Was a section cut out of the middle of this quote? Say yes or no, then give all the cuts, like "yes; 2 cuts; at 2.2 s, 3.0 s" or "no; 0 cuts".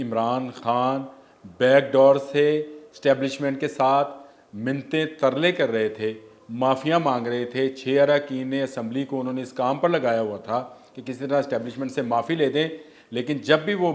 no; 0 cuts